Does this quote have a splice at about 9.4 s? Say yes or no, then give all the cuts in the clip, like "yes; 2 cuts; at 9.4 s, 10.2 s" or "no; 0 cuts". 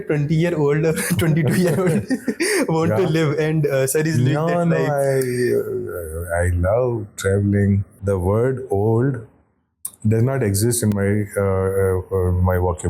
no; 1 cut; at 7.9 s